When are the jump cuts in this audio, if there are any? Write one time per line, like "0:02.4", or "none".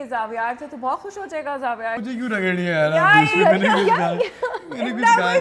0:02.0

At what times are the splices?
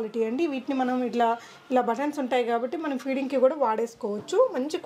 none

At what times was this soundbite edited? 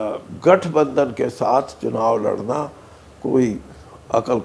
none

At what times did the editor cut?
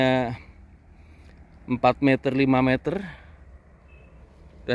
none

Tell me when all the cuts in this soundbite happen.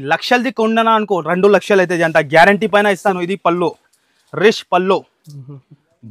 0:03.2

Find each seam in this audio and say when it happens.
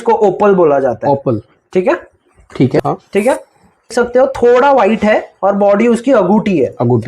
0:02.8
0:03.9

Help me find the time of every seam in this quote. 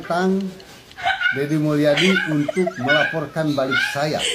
none

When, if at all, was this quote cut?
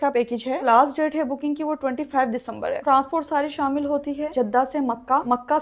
0:02.8
0:04.3

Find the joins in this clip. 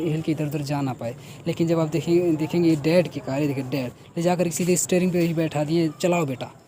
none

